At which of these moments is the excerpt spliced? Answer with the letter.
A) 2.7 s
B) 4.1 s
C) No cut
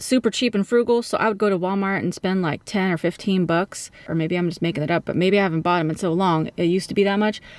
B